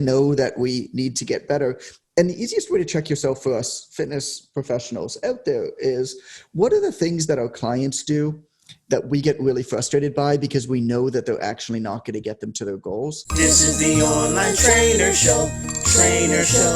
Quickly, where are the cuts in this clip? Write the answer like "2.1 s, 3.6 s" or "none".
13.2 s